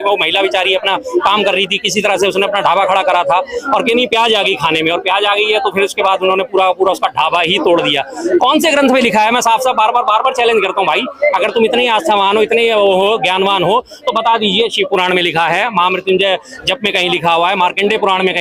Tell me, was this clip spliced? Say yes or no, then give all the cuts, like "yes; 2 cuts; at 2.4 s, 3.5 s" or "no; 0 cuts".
no; 0 cuts